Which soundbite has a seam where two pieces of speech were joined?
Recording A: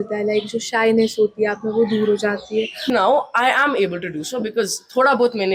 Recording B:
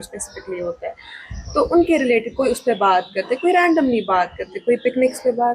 A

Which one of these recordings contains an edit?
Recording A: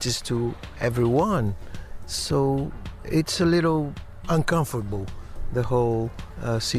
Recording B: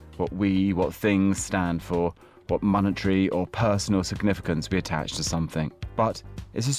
B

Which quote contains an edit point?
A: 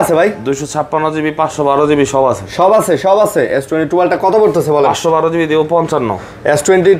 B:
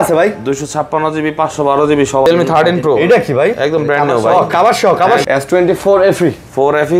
B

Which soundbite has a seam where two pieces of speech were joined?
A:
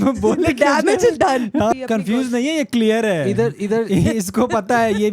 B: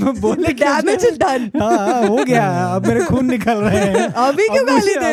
A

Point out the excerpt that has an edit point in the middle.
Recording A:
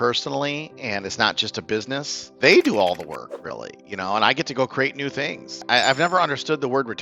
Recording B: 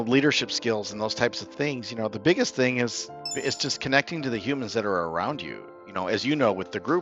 A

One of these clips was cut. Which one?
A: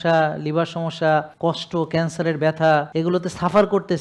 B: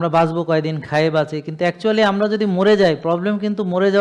A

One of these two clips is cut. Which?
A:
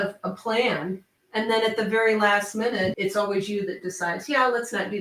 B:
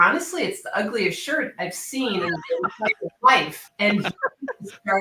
A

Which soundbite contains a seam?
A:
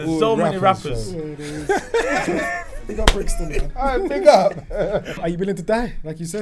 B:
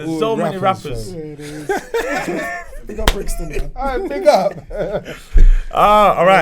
A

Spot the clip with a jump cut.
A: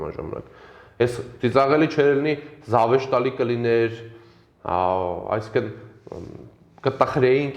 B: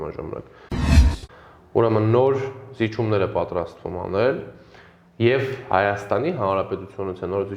B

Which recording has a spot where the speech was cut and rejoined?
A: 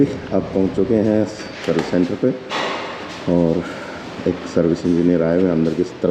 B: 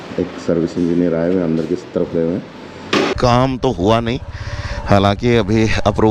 B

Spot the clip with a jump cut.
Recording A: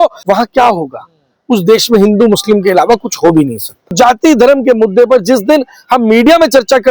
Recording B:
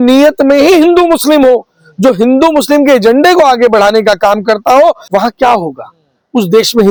A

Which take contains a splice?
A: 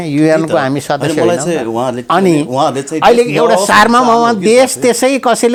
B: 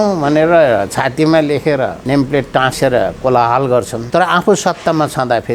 B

